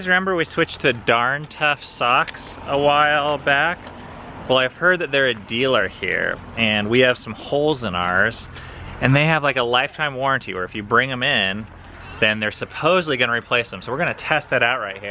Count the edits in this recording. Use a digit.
0